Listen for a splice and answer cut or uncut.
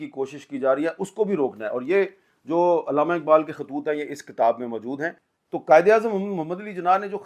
cut